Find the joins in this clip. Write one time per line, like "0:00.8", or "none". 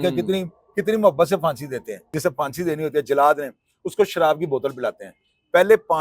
0:02.1